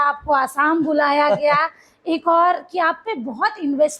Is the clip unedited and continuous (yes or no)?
yes